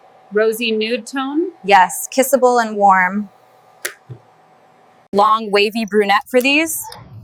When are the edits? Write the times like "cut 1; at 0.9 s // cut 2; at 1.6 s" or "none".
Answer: none